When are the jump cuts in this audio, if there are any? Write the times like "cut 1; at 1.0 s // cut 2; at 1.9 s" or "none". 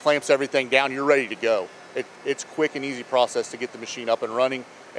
none